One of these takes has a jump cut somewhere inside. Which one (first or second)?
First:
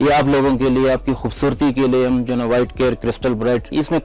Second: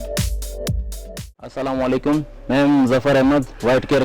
second